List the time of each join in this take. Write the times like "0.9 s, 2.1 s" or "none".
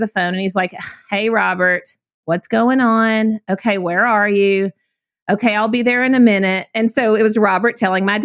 none